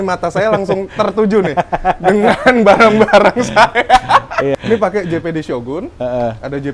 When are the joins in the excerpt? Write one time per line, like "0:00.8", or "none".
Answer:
0:04.5